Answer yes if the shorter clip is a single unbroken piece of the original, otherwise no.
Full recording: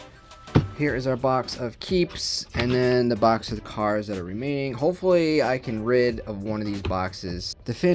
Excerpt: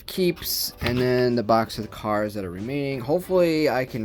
yes